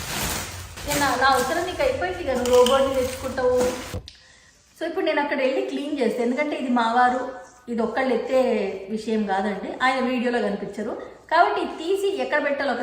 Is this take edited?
yes; 2 cuts; at 0.8 s, 4.0 s

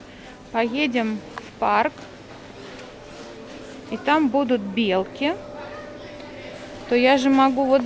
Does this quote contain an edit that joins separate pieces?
no; 0 cuts

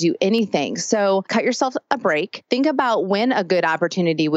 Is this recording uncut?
no; 2 cuts; at 1.3 s, 2.4 s

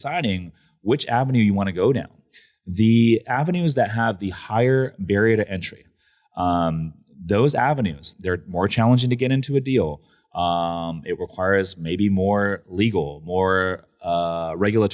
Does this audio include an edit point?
no; 0 cuts

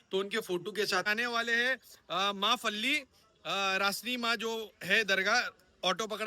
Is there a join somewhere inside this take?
yes; 1 cut; at 1.1 s

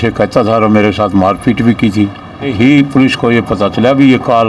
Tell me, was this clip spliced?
yes; 1 cut; at 2.5 s

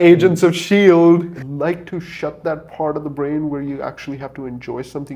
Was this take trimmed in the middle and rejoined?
yes; 1 cut; at 1.4 s

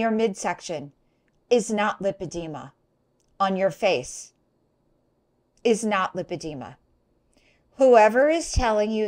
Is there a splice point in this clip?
no; 0 cuts

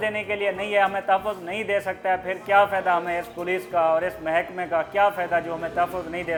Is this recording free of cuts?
yes; 0 cuts

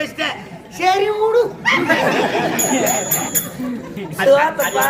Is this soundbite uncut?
yes; 0 cuts

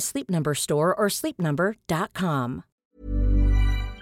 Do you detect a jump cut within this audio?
yes; 1 cut; at 2.8 s

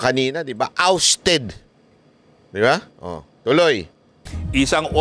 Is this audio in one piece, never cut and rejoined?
yes; 0 cuts

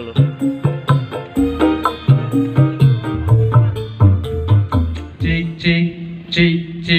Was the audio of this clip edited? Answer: yes; 1 cut; at 5.4 s

